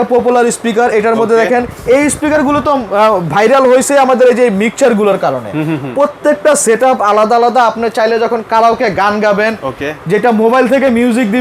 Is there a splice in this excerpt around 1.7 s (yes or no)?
yes